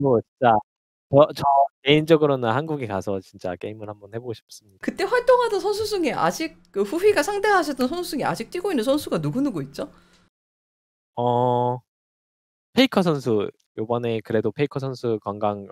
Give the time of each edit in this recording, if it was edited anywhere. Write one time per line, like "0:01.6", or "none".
0:04.8
0:13.6